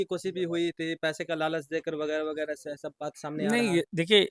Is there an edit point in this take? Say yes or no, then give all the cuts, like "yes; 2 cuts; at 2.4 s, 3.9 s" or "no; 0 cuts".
no; 0 cuts